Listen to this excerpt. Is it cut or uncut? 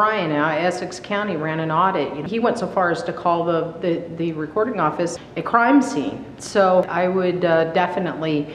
cut